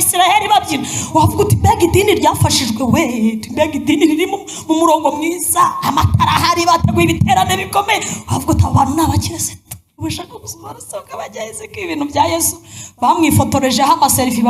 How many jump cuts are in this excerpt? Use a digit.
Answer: 1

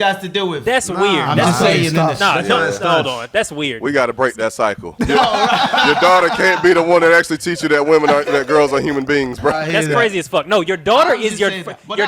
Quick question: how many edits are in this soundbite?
2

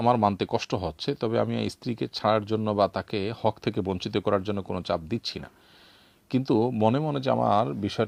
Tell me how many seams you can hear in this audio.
0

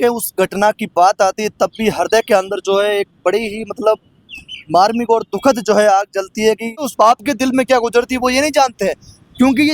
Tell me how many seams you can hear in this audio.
1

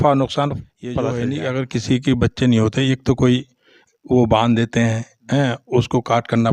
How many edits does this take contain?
1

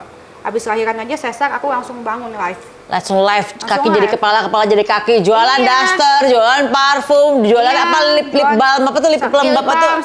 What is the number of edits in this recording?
0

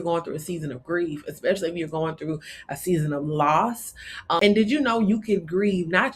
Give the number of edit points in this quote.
1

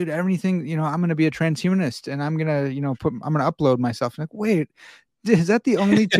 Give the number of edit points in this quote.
0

